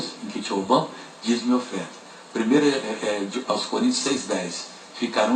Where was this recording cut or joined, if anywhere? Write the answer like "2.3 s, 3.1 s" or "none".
none